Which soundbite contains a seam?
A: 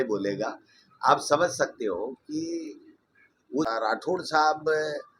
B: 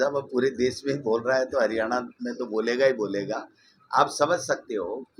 A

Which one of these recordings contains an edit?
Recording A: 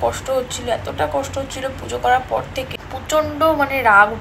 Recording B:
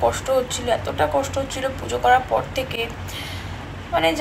A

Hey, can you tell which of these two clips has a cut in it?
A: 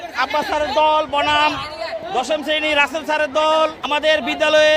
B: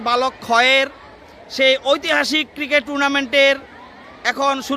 A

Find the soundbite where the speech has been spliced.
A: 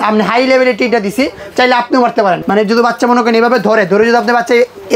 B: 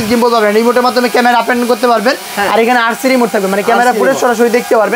A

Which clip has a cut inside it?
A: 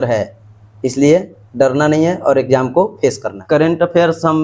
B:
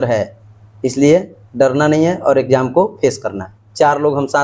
A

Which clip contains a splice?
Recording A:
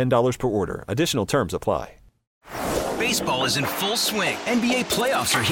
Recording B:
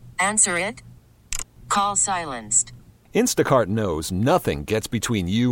A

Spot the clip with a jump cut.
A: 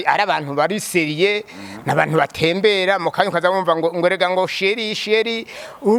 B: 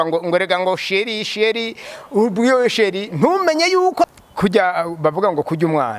B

